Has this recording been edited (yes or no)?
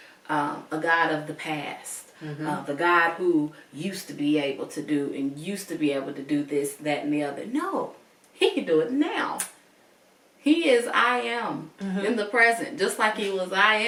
no